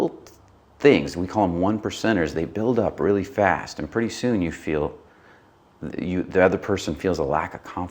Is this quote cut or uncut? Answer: uncut